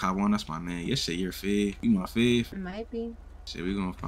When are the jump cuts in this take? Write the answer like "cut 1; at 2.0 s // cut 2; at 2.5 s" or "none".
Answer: cut 1; at 1.8 s // cut 2; at 2.5 s